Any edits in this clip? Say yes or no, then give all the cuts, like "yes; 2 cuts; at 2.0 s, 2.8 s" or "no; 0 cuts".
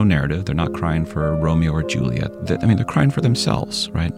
yes; 1 cut; at 2.3 s